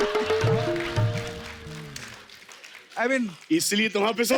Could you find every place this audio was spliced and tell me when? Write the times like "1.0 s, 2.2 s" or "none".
none